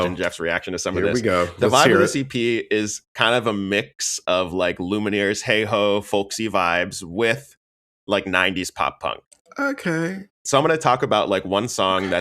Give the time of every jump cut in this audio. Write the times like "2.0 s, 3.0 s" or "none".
10.4 s